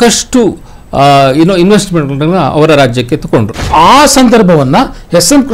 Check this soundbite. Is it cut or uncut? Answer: cut